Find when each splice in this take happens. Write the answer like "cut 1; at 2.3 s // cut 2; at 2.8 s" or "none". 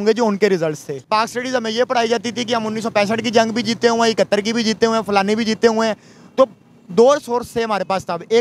cut 1; at 1.0 s